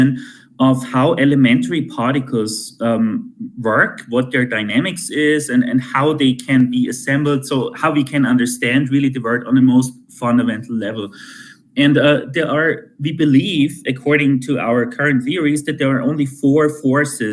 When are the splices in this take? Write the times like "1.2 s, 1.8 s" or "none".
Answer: none